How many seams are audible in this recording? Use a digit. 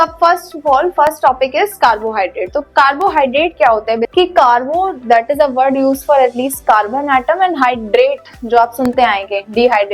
1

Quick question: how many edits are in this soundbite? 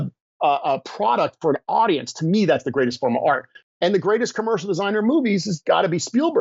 1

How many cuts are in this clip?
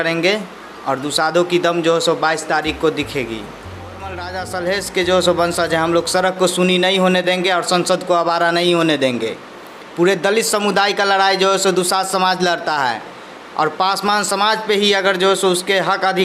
1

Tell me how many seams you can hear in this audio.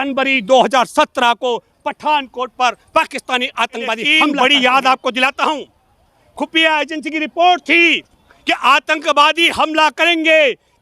1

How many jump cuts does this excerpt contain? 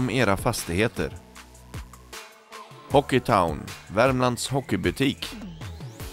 1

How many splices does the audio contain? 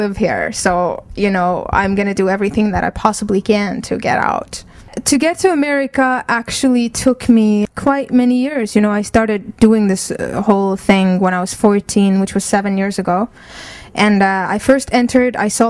1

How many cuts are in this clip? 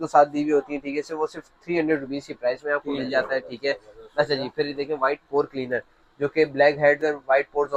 0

